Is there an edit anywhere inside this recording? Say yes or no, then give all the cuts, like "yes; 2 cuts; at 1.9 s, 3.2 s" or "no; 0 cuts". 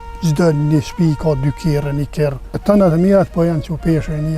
yes; 1 cut; at 2.5 s